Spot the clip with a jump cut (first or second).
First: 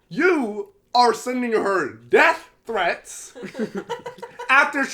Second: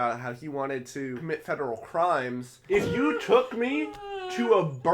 second